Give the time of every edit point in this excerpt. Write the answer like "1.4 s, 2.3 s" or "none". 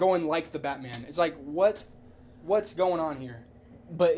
none